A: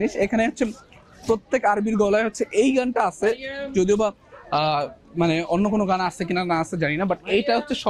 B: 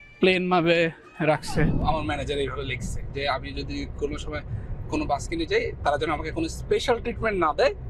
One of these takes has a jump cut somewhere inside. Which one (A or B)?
B